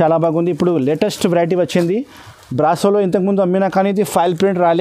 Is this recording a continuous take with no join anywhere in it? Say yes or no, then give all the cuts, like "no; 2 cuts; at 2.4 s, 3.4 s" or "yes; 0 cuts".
yes; 0 cuts